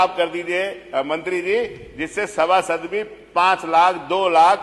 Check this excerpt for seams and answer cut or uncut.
uncut